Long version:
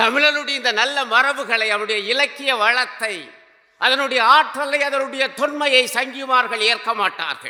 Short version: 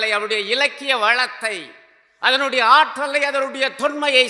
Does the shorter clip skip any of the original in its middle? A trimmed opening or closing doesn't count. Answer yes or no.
no